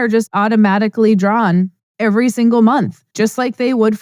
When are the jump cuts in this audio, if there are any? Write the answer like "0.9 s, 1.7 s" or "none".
1.8 s, 3.0 s

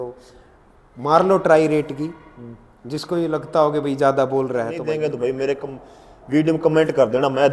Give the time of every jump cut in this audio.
4.8 s

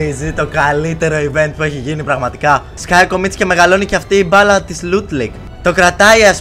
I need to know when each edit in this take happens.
2.7 s, 5.4 s

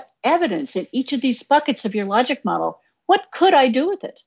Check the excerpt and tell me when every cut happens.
none

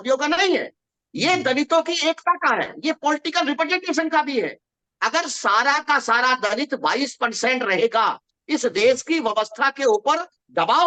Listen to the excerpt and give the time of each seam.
none

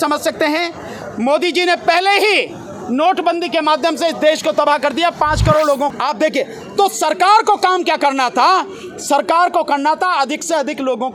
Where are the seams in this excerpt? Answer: 5.9 s

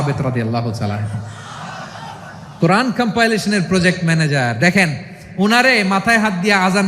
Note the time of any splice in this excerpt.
1.7 s

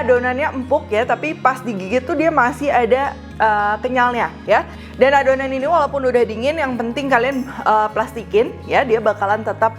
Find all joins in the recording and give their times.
none

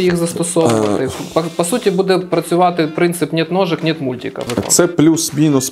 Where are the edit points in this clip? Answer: 4.5 s

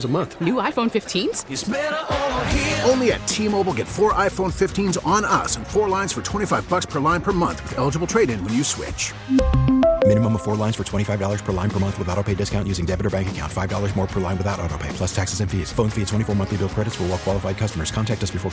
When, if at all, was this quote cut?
none

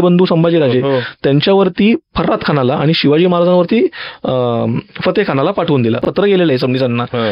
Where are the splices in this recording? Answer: 6.1 s

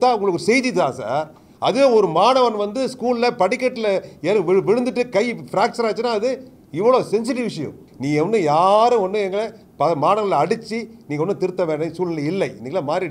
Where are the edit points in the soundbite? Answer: 7.9 s

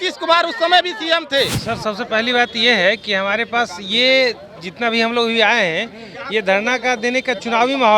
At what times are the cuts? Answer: 1.6 s

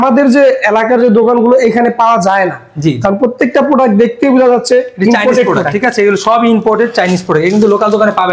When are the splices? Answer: none

